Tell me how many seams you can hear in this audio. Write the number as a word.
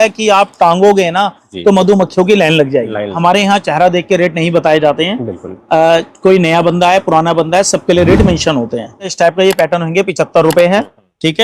two